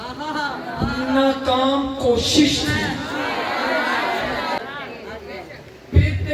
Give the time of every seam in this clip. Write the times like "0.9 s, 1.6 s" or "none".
4.6 s

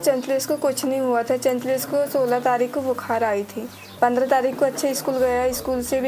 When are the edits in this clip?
none

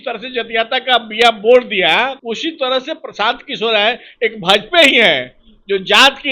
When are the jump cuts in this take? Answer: 2.2 s

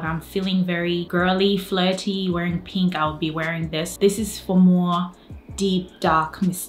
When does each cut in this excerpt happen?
1.1 s, 3.9 s

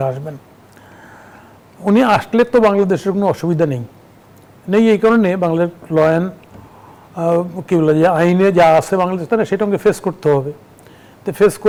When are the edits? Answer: none

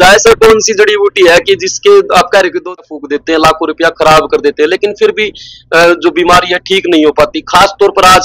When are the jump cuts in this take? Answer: 2.8 s

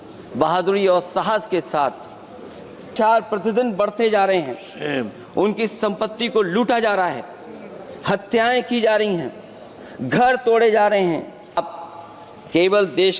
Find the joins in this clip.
2.9 s, 11.6 s

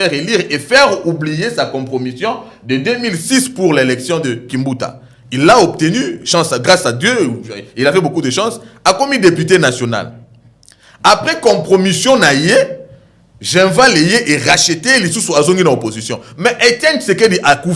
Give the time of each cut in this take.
none

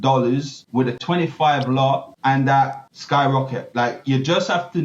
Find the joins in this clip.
1.0 s, 2.1 s, 2.9 s

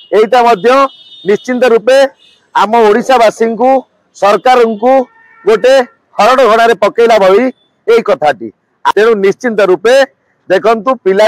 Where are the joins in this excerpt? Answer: 8.9 s

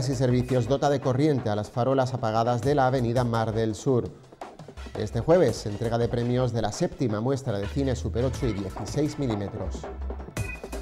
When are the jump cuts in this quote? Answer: 9.7 s

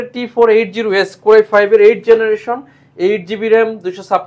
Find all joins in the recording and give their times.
none

